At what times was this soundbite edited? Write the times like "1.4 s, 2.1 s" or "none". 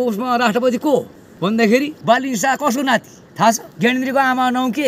1.2 s, 2.0 s, 3.7 s